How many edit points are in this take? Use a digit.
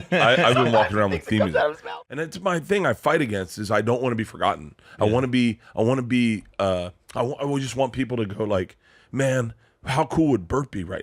1